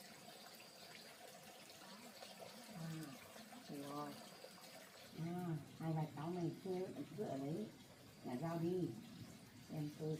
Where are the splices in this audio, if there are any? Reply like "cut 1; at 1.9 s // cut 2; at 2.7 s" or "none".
none